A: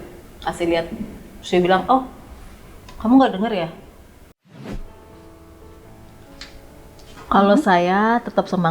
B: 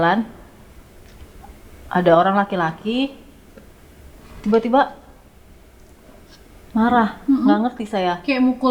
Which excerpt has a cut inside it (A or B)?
A